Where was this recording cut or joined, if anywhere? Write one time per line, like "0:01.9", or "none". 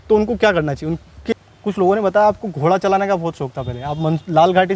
0:01.3